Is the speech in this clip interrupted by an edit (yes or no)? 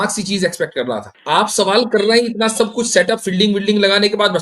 yes